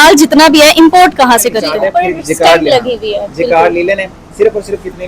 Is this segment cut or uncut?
cut